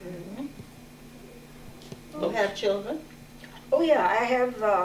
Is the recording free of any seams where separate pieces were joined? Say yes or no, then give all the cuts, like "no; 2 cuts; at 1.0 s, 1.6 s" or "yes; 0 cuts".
yes; 0 cuts